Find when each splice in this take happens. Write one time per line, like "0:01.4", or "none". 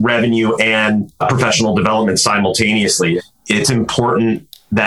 0:01.2
0:03.2